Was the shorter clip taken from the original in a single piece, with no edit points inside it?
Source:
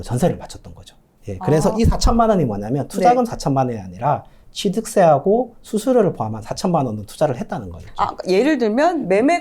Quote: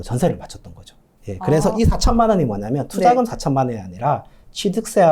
yes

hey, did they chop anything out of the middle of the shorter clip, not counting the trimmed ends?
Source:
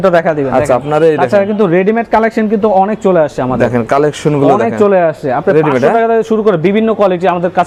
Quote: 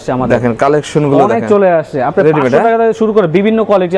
no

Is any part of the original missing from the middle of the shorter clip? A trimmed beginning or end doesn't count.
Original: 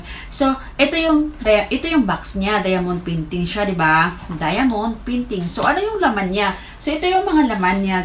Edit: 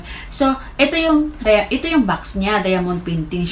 no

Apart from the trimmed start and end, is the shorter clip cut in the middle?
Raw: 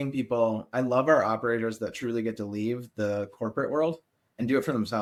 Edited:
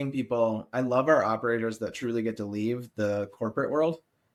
no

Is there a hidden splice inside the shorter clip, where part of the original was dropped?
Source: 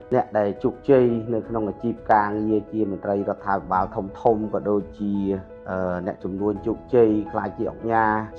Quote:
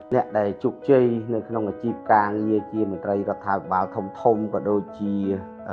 no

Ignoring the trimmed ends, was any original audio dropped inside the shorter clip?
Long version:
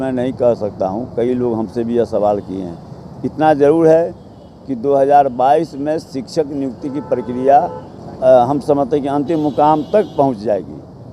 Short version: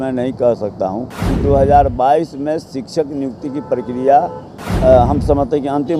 yes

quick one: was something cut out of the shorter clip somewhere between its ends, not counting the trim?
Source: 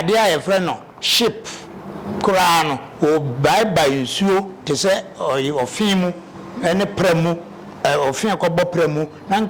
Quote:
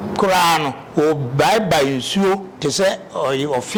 no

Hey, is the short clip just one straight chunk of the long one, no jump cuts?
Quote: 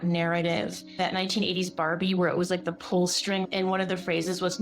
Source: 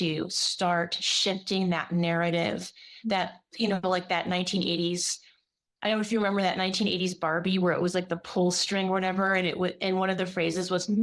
no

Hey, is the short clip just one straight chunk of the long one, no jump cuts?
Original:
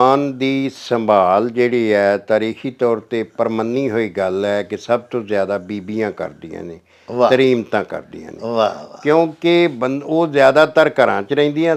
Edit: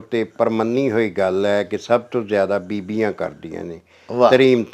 yes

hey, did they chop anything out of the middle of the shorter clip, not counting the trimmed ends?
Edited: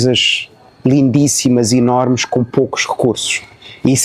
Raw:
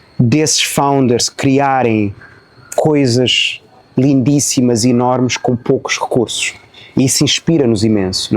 no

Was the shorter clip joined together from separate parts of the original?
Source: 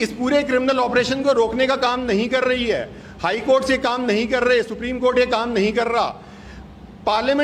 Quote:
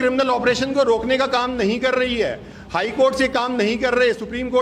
no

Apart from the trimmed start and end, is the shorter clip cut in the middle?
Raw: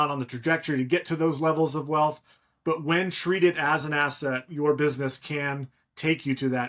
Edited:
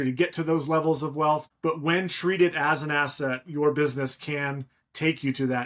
yes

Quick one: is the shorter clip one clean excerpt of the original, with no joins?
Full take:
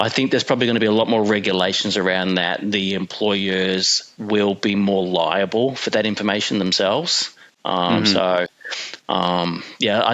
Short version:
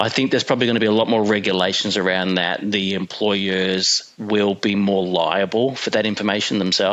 yes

